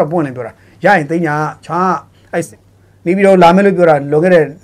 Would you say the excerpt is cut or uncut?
cut